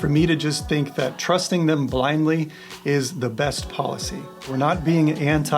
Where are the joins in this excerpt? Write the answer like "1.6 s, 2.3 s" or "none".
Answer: 4.4 s